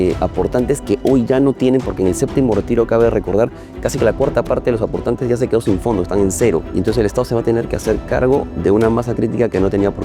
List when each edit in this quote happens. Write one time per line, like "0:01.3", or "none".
0:03.7
0:06.7